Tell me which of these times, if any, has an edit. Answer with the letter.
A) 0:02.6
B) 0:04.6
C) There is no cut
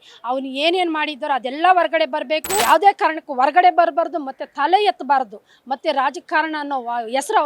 A